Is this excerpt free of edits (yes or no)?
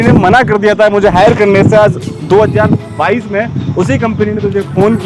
yes